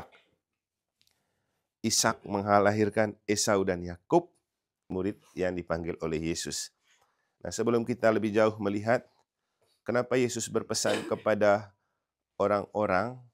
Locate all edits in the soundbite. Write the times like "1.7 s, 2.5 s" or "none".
4.9 s